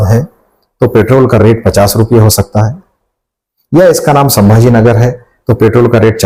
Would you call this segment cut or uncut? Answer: uncut